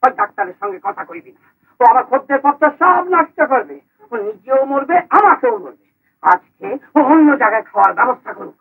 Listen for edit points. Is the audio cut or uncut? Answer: uncut